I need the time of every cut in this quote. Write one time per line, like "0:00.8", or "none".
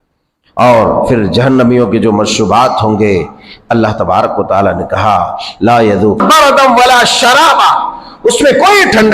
0:06.2